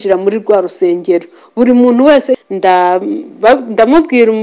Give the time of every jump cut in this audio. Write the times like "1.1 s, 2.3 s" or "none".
2.4 s